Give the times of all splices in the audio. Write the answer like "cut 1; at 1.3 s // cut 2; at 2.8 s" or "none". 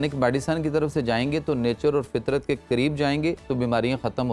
none

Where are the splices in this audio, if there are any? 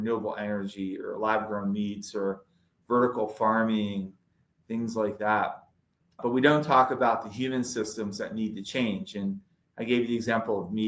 cut 1; at 6.2 s

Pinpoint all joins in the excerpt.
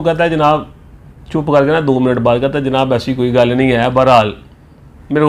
none

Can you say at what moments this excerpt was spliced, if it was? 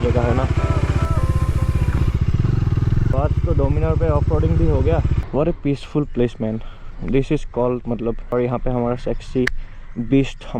cut 1; at 1.1 s // cut 2; at 3.1 s // cut 3; at 5.2 s // cut 4; at 8.3 s

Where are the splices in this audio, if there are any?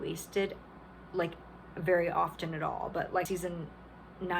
cut 1; at 3.3 s

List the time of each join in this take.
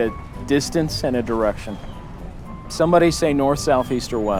none

